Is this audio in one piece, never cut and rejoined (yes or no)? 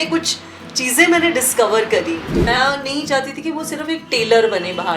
no